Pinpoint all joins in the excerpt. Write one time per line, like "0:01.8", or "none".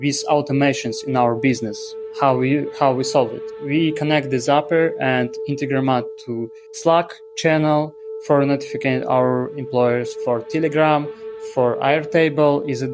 none